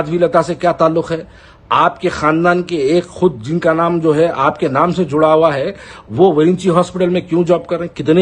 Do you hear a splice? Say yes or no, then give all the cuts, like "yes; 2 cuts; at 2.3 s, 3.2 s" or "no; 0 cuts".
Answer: no; 0 cuts